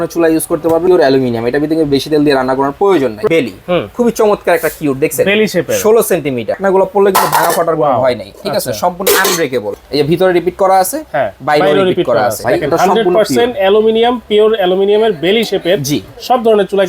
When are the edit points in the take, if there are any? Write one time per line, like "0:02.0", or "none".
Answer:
0:00.9
0:03.2
0:06.6
0:09.7
0:12.4